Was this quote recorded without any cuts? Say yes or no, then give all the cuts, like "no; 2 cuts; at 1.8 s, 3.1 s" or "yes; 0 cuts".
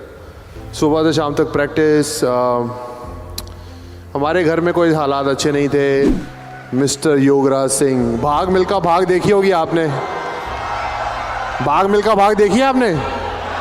no; 1 cut; at 6.2 s